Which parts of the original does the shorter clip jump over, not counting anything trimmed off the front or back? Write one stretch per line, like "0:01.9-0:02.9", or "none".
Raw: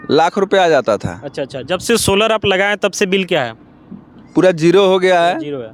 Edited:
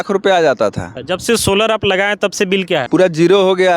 0:01.2-0:01.5
0:03.5-0:04.3